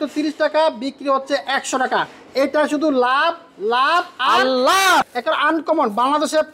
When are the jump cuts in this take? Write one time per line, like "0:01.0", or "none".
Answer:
0:05.1